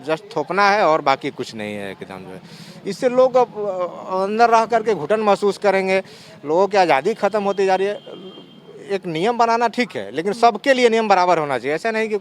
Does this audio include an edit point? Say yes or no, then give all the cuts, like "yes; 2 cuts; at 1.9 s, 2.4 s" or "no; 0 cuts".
no; 0 cuts